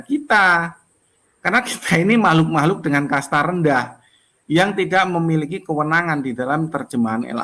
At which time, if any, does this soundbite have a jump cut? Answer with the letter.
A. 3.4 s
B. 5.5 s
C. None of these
C